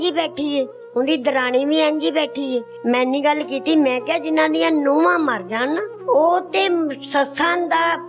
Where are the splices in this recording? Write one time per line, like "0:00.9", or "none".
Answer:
0:02.7
0:05.9